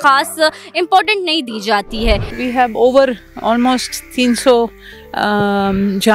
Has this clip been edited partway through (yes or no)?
yes